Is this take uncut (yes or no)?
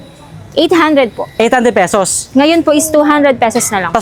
yes